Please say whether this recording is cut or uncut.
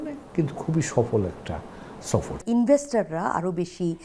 cut